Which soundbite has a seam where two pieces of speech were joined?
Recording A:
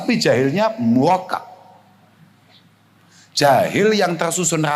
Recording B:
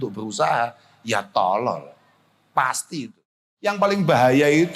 B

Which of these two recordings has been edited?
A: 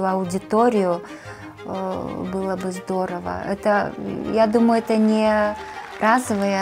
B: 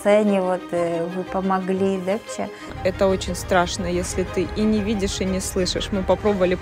B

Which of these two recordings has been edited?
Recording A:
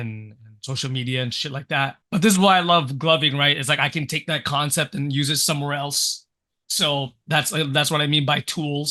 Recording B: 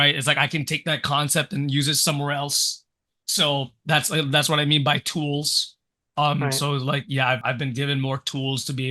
B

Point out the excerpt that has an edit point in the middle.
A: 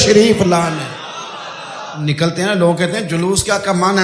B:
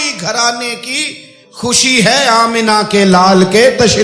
A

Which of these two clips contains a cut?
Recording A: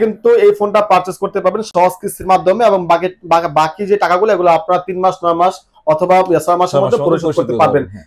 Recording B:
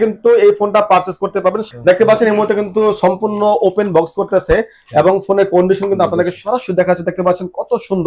B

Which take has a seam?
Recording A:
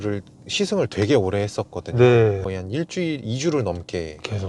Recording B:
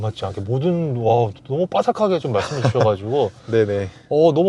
A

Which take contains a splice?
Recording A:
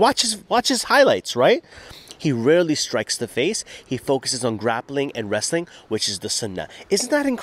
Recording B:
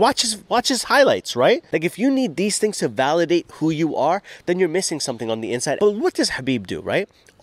B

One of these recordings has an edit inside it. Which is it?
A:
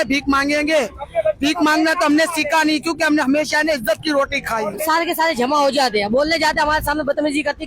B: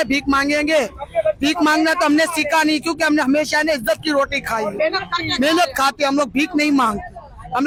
A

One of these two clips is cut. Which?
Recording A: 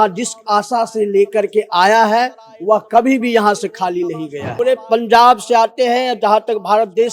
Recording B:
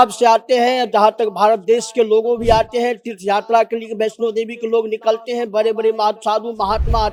A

